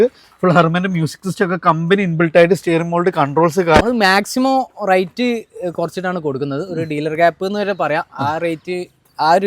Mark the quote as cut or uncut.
cut